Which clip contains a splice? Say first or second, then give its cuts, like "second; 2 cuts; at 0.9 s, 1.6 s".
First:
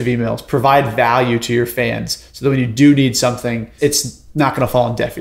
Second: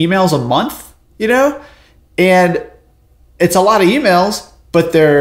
first; 1 cut; at 3.7 s